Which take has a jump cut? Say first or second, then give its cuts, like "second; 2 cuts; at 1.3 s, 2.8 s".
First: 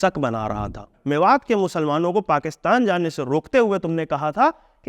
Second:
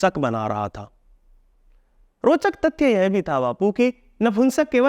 first; 1 cut; at 0.9 s